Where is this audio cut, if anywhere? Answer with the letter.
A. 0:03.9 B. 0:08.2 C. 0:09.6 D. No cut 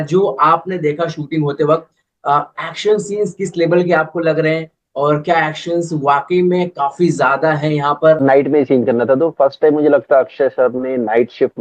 B